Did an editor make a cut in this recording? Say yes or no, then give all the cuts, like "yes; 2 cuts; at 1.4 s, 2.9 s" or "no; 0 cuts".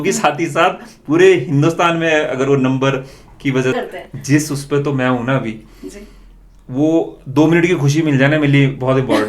yes; 1 cut; at 3.7 s